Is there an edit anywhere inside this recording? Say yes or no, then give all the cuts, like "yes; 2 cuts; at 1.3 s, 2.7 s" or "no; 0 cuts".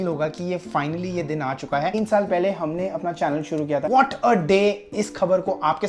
yes; 2 cuts; at 1.9 s, 3.9 s